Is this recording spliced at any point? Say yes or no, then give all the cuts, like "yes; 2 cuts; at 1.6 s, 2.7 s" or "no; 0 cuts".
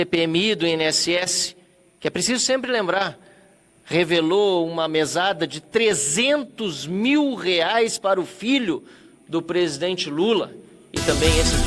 no; 0 cuts